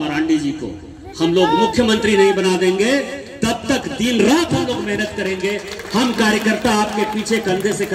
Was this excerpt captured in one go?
yes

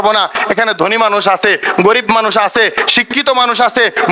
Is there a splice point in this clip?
no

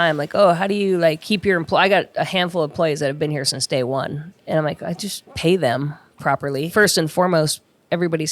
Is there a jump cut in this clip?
yes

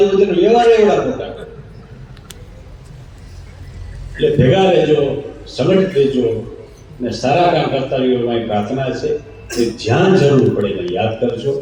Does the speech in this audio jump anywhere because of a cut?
no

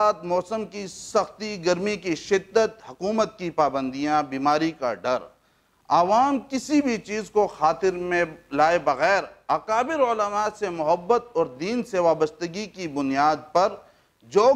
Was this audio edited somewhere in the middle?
no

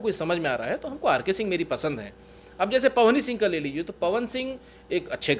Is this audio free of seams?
yes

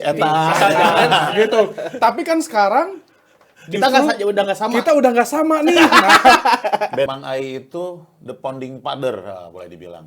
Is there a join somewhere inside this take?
yes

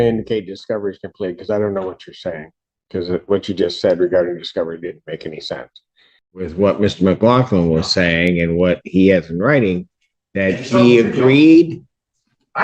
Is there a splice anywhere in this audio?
yes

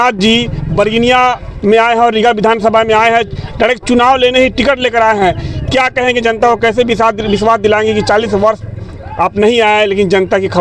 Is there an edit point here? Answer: no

